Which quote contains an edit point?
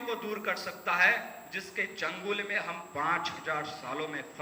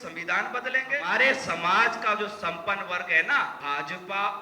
second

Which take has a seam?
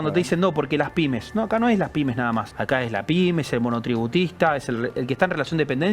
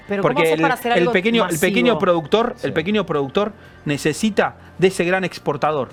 first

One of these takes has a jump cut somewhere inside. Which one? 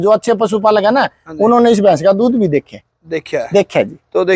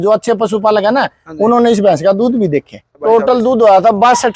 second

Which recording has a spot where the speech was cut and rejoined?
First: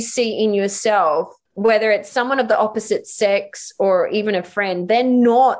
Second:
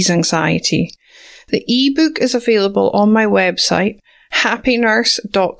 first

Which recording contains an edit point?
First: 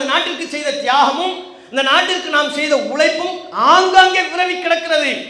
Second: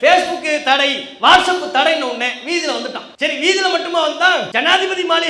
second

